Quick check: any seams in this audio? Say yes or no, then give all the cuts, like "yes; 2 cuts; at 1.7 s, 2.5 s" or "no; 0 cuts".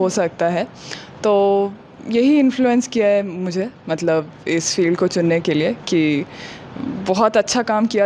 no; 0 cuts